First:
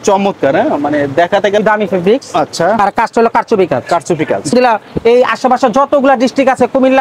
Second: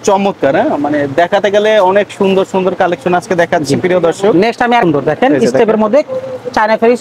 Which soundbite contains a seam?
first; 2 cuts; at 1.6 s, 4.5 s

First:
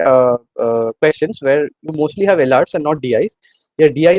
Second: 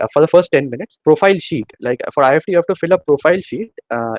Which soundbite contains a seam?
second; 1 cut; at 1.0 s

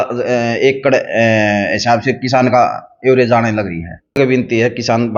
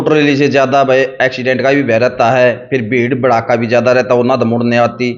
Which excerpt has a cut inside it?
first; 1 cut; at 4.2 s

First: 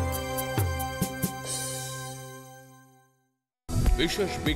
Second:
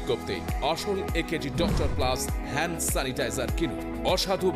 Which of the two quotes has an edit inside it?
first; 1 cut; at 3.5 s

